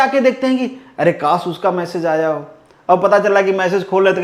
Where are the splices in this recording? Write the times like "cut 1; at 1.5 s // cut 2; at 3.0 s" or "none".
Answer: none